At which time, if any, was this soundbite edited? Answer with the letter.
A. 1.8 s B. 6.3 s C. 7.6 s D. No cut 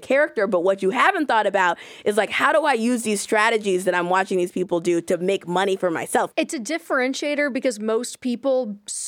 B